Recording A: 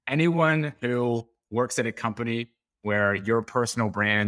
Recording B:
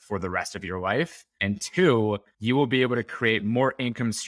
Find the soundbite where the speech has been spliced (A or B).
B